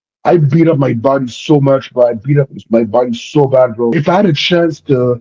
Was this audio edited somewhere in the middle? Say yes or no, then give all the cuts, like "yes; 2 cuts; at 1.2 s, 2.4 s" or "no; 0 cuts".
yes; 1 cut; at 4.0 s